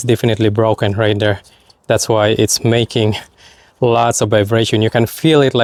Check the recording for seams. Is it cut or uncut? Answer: uncut